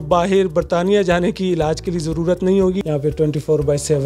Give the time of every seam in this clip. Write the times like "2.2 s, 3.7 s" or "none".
2.8 s